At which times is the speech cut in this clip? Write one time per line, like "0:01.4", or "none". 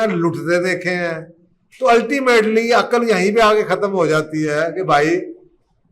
none